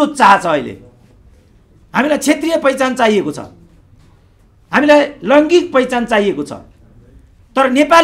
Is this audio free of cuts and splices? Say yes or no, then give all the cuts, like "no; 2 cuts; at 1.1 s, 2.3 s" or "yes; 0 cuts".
yes; 0 cuts